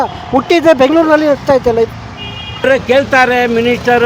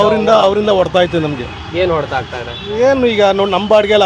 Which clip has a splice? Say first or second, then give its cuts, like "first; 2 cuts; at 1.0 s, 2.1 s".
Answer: first; 1 cut; at 2.6 s